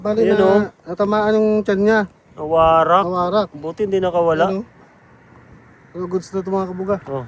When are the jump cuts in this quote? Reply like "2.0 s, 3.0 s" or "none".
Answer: none